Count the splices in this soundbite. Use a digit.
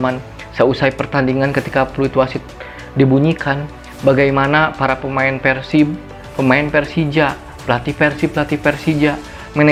0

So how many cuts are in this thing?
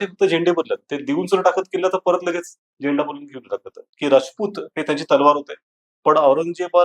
1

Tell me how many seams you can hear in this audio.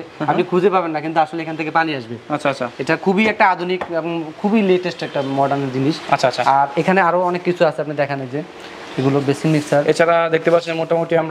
0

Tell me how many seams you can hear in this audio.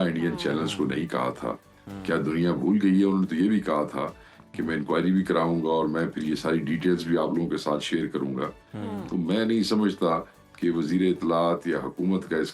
0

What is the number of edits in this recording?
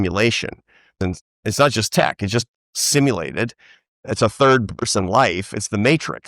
2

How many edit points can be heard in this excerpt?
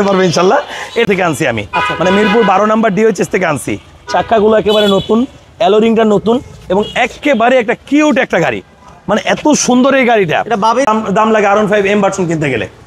2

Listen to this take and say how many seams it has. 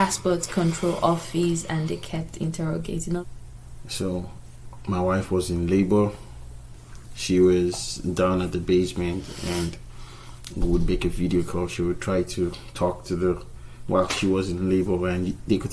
1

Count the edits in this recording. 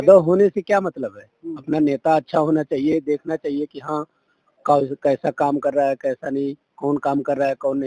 0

